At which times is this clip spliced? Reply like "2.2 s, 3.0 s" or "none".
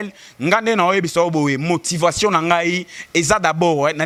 none